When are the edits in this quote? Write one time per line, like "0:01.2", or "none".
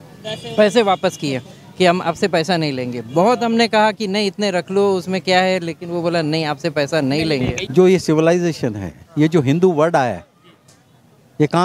0:07.6